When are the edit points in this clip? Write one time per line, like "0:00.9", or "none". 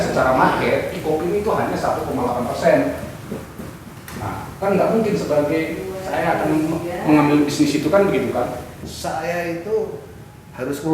0:08.8